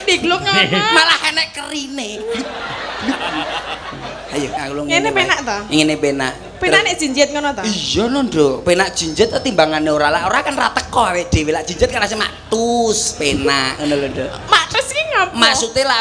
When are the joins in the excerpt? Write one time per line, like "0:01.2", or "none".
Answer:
0:04.6